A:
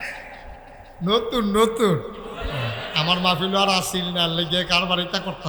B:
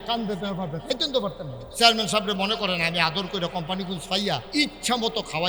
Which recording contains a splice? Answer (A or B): B